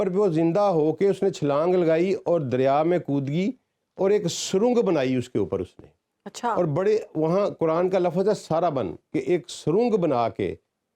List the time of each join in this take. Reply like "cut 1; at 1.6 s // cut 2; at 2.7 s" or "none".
none